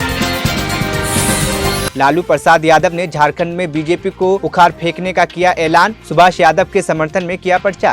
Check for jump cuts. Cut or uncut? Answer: cut